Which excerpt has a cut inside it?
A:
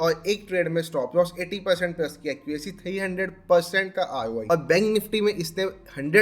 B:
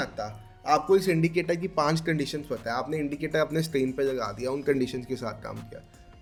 A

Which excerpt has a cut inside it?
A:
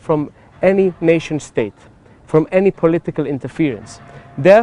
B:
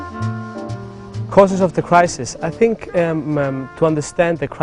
B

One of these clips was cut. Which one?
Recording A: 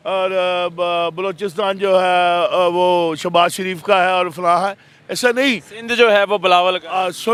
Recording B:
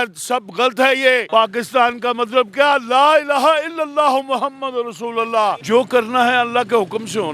B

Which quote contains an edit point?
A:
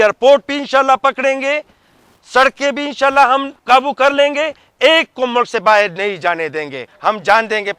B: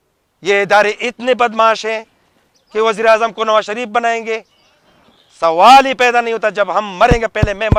A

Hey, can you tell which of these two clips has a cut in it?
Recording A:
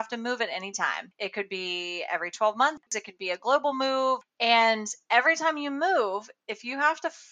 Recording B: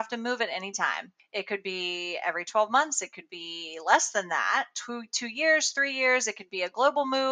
A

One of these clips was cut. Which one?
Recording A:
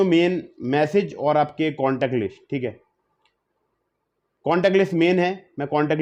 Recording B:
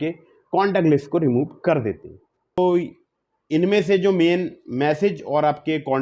B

